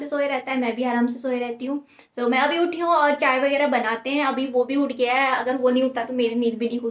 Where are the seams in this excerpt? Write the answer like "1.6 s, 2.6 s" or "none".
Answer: none